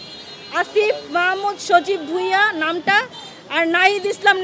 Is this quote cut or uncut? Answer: uncut